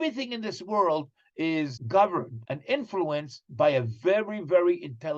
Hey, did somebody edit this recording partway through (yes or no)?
yes